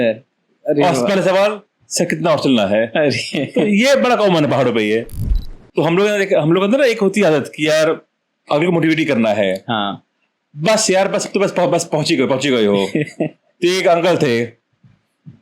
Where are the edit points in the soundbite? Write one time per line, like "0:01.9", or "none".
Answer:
0:05.4